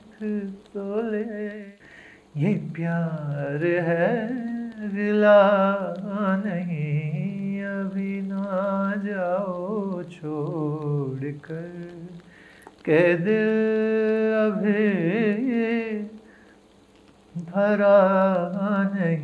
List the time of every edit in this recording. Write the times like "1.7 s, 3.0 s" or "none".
1.6 s